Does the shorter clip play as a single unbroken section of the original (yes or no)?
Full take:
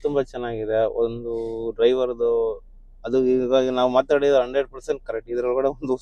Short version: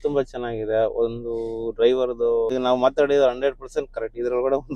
no